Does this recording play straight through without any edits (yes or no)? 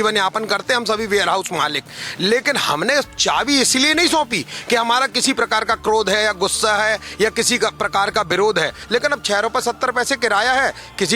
no